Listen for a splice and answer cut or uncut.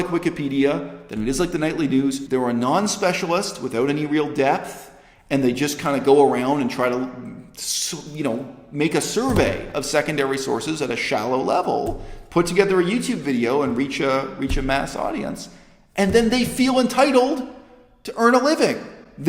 cut